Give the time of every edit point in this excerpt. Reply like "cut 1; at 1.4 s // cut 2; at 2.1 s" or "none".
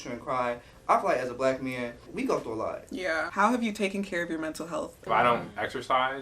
cut 1; at 2.1 s // cut 2; at 3.3 s // cut 3; at 5.0 s